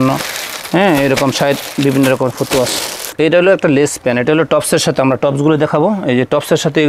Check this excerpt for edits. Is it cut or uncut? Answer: cut